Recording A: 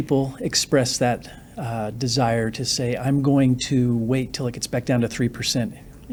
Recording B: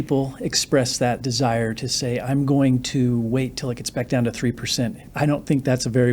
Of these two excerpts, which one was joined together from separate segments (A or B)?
B